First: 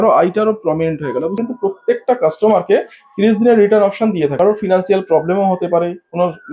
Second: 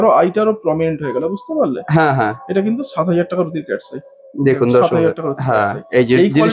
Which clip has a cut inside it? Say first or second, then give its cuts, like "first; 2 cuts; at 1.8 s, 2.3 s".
first; 2 cuts; at 1.4 s, 4.3 s